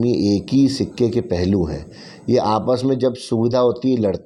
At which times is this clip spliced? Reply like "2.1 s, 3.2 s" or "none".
none